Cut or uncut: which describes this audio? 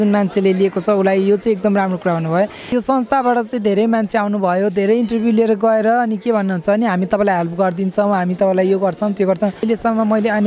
cut